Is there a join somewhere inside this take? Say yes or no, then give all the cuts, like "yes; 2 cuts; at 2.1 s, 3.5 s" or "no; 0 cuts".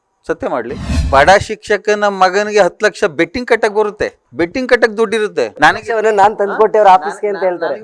yes; 1 cut; at 0.9 s